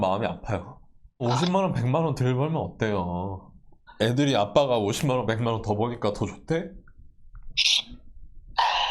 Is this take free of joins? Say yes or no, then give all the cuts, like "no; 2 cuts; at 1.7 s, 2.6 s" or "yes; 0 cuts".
no; 1 cut; at 1.2 s